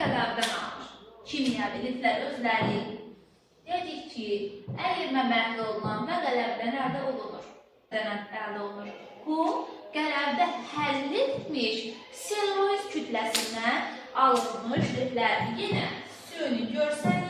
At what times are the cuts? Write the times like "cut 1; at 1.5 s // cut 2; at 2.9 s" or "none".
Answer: cut 1; at 7.9 s